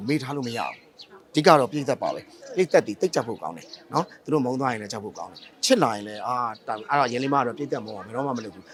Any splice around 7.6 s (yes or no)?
no